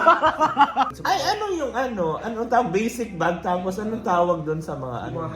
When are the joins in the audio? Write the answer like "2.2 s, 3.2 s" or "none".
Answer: 1.0 s